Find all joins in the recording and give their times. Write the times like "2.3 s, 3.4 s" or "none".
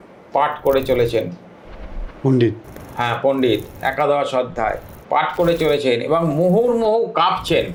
none